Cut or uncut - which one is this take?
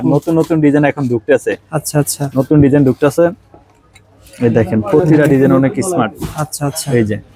uncut